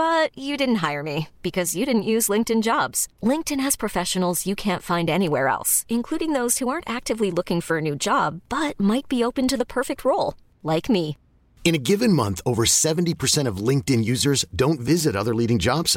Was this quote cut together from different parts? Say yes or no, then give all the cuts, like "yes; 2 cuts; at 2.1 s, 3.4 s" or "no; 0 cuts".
no; 0 cuts